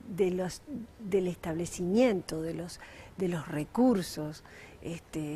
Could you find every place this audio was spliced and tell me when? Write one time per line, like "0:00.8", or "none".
0:01.0